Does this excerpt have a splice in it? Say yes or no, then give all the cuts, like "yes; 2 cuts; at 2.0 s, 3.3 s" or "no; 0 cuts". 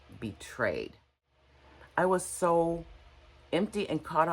yes; 1 cut; at 1.3 s